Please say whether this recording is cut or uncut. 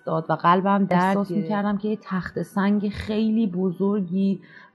cut